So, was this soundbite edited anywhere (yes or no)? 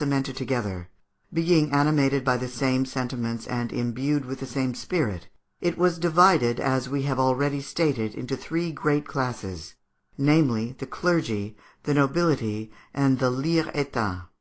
no